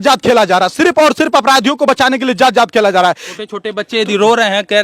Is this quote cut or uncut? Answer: cut